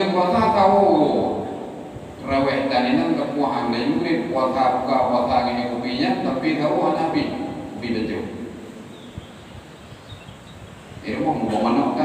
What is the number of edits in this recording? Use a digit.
0